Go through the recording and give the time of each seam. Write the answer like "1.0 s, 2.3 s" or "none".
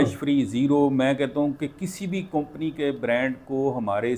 none